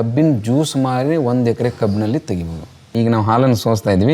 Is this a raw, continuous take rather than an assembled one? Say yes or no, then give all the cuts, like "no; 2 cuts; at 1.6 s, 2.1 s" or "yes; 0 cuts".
no; 1 cut; at 2.8 s